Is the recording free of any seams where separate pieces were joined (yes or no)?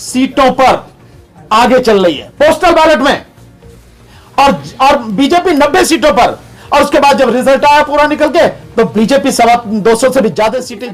yes